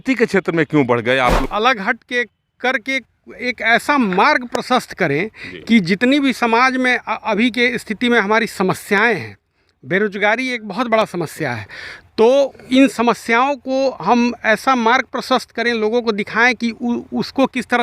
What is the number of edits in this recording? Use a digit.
1